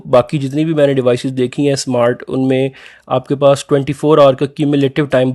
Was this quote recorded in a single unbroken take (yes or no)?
yes